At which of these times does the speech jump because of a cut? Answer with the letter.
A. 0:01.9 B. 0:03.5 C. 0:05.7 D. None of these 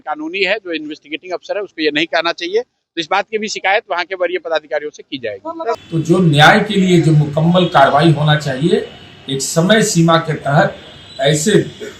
C